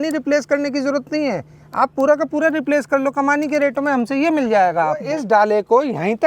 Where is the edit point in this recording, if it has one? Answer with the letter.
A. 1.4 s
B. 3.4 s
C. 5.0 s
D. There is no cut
C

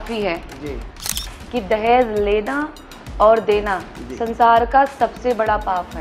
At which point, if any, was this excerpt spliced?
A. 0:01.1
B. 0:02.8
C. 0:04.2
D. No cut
A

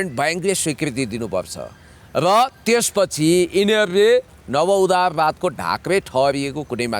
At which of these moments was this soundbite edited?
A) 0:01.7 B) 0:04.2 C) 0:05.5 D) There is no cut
D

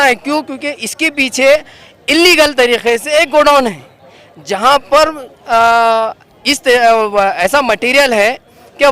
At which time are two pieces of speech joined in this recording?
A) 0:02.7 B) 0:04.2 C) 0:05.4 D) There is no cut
D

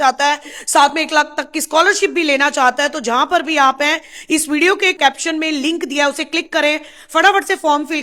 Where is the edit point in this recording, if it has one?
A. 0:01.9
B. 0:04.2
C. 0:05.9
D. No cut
D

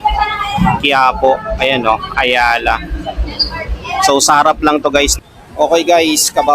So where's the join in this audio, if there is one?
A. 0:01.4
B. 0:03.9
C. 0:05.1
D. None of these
C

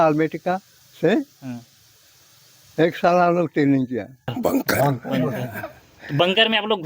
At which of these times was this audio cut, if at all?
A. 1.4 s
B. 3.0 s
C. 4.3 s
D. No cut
C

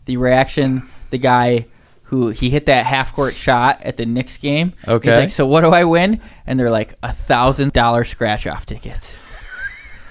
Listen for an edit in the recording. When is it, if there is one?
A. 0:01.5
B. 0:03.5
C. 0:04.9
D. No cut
D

